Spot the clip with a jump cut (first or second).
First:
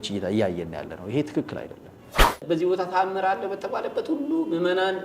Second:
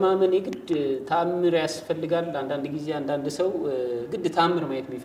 first